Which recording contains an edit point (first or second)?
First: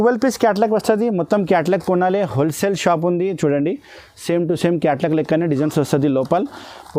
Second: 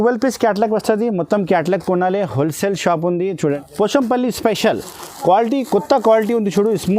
second